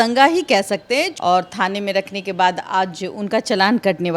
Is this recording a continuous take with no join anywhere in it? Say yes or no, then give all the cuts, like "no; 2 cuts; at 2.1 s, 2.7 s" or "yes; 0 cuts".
no; 1 cut; at 1.1 s